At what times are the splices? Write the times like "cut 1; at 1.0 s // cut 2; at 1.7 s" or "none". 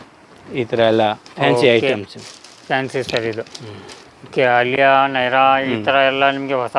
none